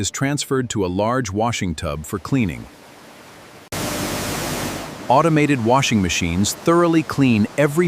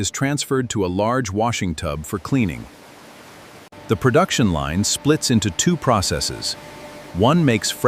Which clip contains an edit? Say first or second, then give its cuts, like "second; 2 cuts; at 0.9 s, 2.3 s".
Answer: first; 1 cut; at 3.8 s